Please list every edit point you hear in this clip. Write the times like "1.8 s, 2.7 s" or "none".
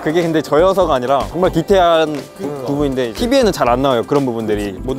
none